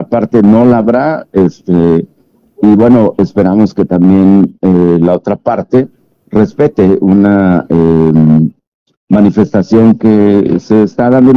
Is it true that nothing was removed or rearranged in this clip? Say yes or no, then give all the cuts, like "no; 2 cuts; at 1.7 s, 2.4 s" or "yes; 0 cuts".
yes; 0 cuts